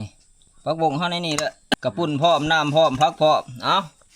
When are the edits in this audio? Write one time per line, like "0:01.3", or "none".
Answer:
0:01.6